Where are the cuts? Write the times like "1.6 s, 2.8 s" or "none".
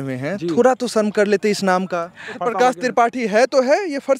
2.3 s